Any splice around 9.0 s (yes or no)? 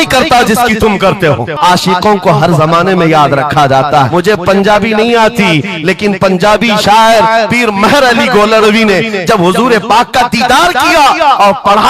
no